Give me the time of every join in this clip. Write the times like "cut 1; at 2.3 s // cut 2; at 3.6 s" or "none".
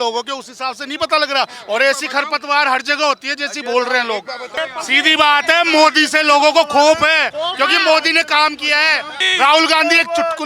cut 1; at 4.6 s // cut 2; at 9.2 s